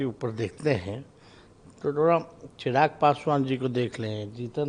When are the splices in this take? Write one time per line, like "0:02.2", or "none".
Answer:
none